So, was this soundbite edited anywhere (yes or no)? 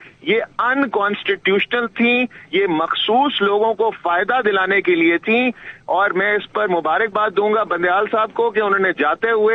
no